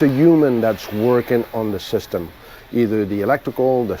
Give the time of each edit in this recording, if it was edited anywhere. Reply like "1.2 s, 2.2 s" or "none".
none